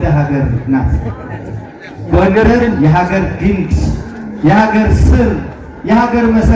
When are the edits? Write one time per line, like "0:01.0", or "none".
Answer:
none